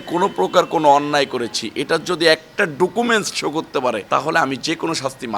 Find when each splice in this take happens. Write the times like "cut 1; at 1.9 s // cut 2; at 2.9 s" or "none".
cut 1; at 4.0 s

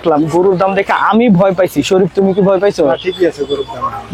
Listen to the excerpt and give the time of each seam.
none

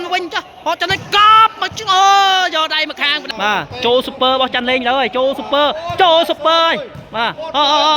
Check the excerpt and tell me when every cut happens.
cut 1; at 3.2 s

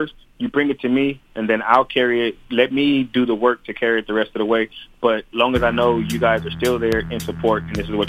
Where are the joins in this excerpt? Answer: none

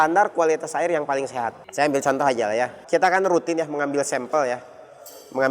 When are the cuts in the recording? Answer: cut 1; at 1.6 s // cut 2; at 2.8 s

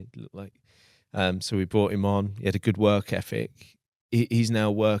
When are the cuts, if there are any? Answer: none

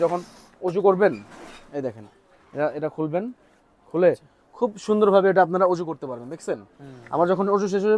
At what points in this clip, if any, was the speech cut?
none

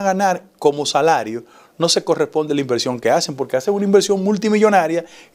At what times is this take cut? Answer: none

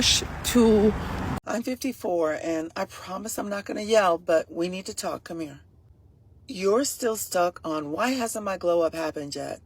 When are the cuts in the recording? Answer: cut 1; at 1.2 s

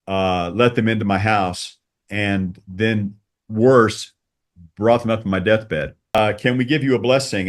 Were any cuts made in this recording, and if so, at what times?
cut 1; at 6.2 s

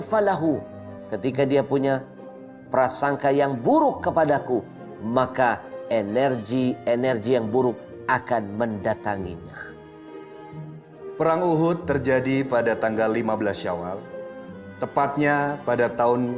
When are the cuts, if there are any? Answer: none

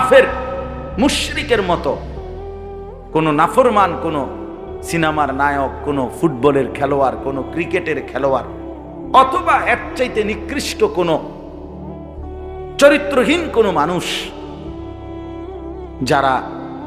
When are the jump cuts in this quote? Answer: cut 1; at 11.3 s // cut 2; at 12.8 s

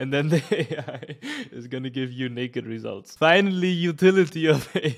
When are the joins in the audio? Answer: cut 1; at 3.0 s

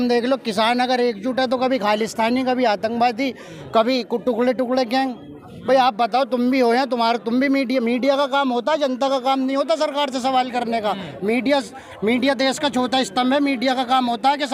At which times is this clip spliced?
none

